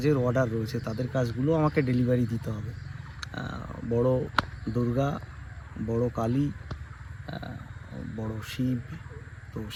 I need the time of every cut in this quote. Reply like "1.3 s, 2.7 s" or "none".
none